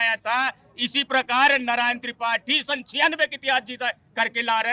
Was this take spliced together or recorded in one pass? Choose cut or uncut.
uncut